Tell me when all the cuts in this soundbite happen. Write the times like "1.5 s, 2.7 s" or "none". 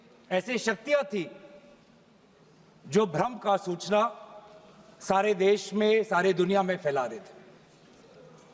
none